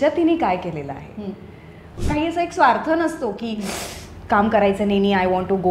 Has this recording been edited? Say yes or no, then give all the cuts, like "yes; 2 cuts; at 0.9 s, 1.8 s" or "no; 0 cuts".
yes; 1 cut; at 2.0 s